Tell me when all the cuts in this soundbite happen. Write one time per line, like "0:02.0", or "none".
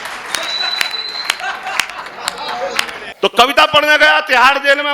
0:03.1